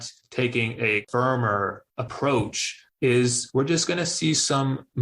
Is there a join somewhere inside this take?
yes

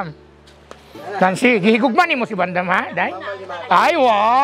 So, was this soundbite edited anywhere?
no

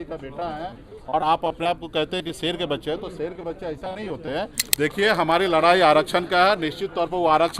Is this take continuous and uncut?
no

